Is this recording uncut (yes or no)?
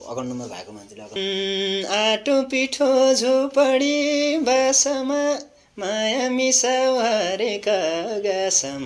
no